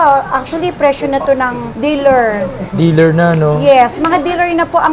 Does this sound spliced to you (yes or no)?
no